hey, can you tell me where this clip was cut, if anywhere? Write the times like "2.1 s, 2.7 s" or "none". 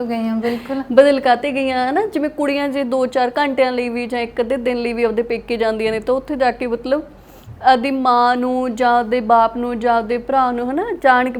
none